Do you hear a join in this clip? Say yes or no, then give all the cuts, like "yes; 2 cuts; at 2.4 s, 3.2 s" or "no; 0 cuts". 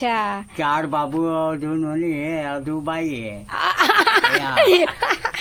no; 0 cuts